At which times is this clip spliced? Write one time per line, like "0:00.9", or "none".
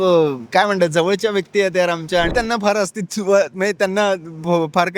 0:02.3